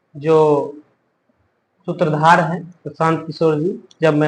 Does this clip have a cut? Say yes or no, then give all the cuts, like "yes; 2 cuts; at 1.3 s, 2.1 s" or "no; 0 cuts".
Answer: no; 0 cuts